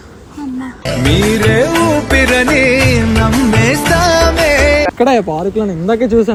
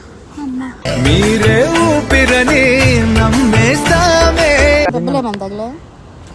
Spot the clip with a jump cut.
second; 1 cut; at 4.9 s

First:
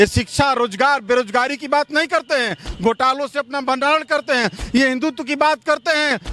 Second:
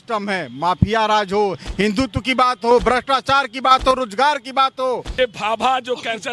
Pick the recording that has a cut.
second; 1 cut; at 5.1 s

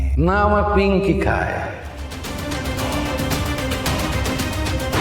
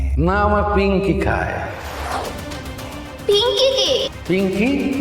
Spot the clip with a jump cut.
second; 1 cut; at 3.2 s

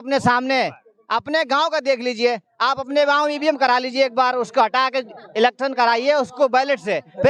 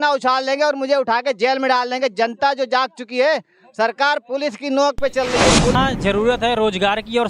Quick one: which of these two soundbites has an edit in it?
second; 1 cut; at 5.7 s

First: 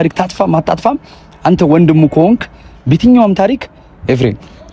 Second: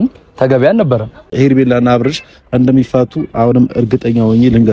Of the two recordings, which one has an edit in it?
second; 1 cut; at 1.3 s

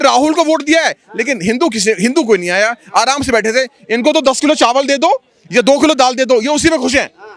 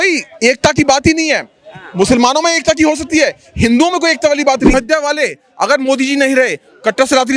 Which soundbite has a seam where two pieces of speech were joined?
second; 1 cut; at 4.7 s

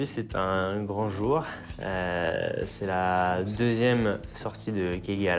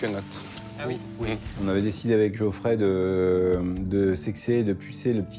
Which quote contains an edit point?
second; 1 cut; at 1.5 s

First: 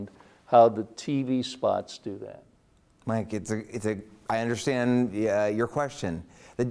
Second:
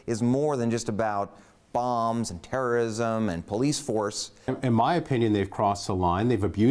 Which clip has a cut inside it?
second; 1 cut; at 4.3 s

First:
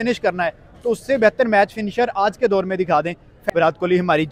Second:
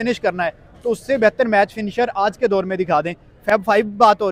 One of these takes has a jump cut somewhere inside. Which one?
first; 1 cut; at 3.3 s

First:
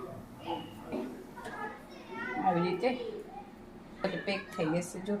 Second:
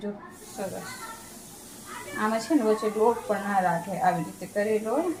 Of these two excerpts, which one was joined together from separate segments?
first; 2 cuts; at 0.9 s, 4.0 s

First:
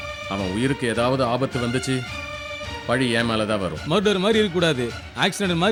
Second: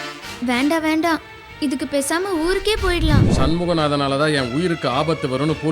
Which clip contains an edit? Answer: second; 1 cut; at 3.3 s

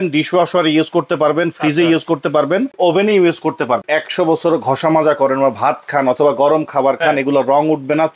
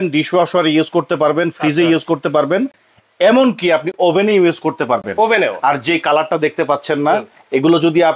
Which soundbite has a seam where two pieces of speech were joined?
first; 2 cuts; at 2.7 s, 3.8 s

